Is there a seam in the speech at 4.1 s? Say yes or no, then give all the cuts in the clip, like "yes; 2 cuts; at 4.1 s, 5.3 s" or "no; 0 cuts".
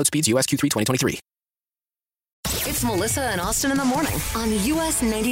no; 1 cut; at 2.4 s